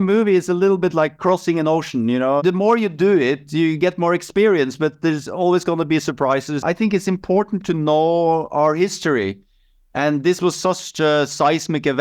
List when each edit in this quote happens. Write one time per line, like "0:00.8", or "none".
0:02.4
0:06.5